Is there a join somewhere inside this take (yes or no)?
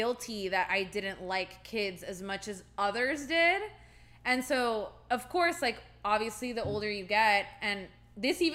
no